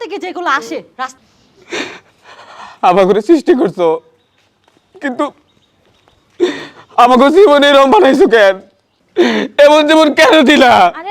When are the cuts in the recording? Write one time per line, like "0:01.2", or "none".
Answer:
0:01.1